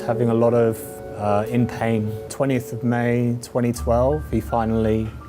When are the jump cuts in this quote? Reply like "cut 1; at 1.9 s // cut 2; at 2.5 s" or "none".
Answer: cut 1; at 2.2 s

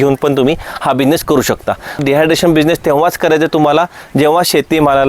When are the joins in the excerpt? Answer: cut 1; at 2.0 s

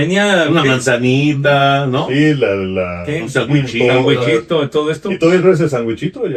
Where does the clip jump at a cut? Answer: none

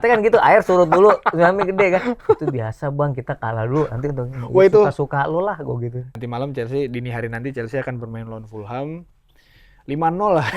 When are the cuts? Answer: cut 1; at 6.0 s

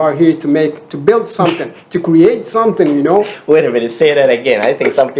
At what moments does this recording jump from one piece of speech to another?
none

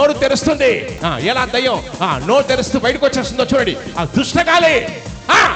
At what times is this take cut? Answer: cut 1; at 0.9 s

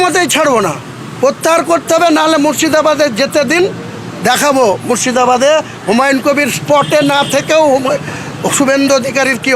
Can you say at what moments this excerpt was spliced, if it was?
none

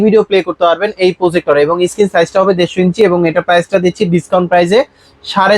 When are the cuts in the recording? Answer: none

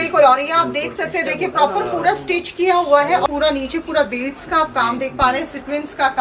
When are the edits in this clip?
cut 1; at 3.3 s

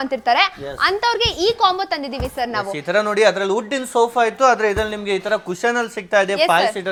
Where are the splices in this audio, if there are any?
none

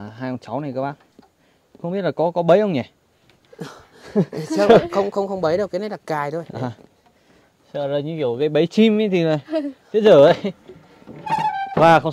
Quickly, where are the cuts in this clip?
none

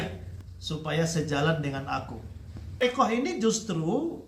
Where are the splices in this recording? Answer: cut 1; at 2.8 s

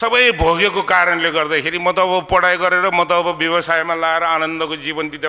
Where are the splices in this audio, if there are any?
none

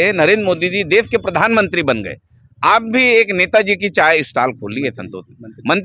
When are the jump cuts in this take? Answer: none

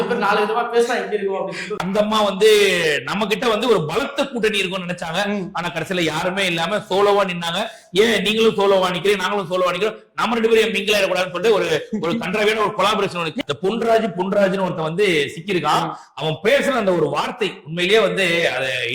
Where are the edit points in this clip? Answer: cut 1; at 1.8 s // cut 2; at 13.3 s

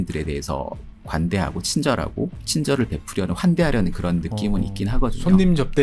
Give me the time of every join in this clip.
cut 1; at 0.9 s // cut 2; at 2.4 s

